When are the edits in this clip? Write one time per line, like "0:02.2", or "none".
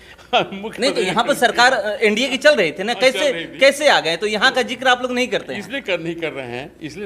none